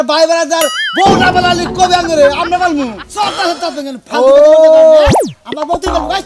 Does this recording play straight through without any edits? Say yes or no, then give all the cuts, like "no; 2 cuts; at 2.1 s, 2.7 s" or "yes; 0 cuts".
yes; 0 cuts